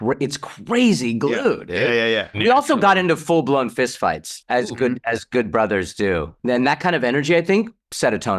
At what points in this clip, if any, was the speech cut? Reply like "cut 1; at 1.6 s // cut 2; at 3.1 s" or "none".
cut 1; at 2.3 s // cut 2; at 6.3 s